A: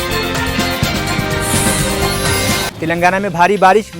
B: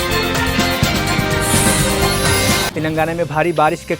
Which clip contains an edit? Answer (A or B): B